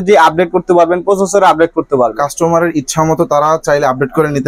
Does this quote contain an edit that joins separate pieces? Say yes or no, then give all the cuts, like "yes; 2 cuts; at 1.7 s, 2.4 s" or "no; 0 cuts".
no; 0 cuts